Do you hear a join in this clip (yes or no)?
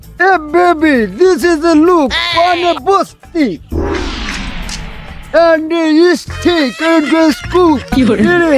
no